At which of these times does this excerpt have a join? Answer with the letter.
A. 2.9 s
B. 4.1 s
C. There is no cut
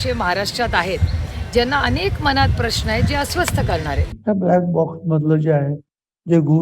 B